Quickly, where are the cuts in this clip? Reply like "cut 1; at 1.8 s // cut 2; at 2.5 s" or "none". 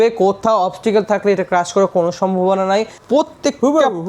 cut 1; at 3.0 s